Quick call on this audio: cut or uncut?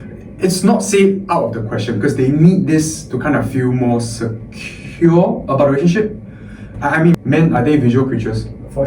cut